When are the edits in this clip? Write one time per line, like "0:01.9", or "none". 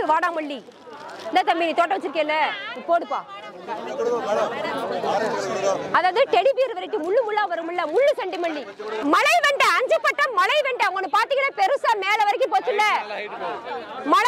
0:08.8